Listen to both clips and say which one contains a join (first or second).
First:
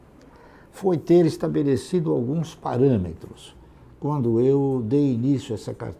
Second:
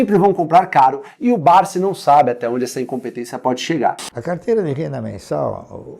second